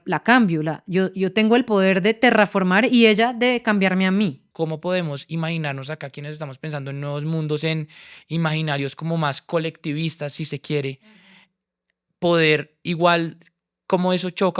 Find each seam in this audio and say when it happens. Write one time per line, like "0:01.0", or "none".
0:04.4